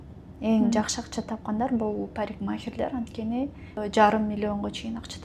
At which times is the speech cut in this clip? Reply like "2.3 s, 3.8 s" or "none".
3.8 s